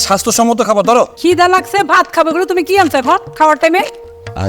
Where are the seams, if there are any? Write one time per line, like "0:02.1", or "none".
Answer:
0:01.1